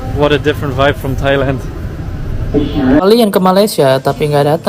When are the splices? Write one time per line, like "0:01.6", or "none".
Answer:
0:03.0